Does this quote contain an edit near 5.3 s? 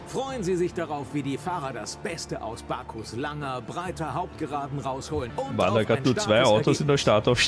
yes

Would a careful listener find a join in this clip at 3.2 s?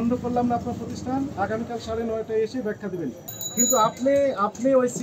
yes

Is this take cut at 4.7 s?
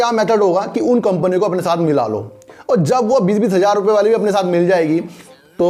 no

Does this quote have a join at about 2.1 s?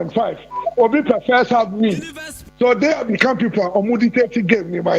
no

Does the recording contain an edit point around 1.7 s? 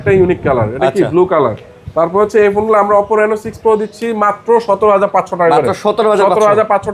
no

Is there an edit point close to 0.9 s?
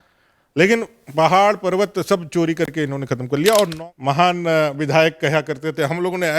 no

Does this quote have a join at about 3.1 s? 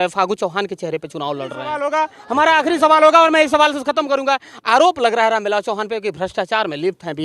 no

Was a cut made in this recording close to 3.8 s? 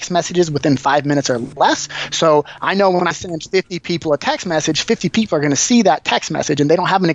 no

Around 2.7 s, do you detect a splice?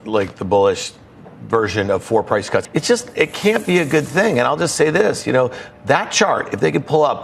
yes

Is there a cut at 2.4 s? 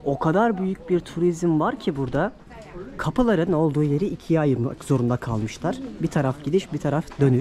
no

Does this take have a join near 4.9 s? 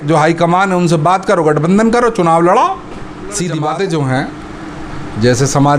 no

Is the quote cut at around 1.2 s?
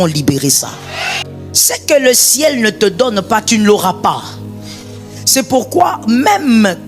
yes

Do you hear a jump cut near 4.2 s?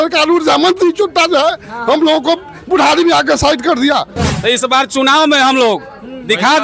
yes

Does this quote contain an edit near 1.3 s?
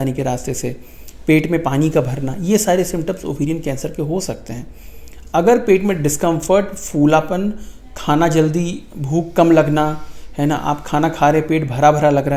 no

